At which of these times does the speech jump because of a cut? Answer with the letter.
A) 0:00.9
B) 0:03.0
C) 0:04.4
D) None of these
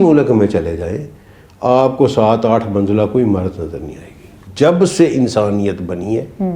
C